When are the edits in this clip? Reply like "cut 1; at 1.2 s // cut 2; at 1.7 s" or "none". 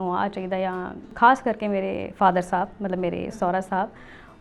cut 1; at 1.1 s